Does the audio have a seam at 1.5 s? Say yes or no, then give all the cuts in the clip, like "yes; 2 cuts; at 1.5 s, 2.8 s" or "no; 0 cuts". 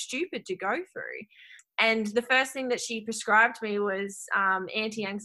yes; 1 cut; at 1.5 s